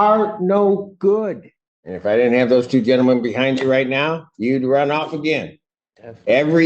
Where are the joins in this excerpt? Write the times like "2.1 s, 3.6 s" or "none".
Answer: 2.0 s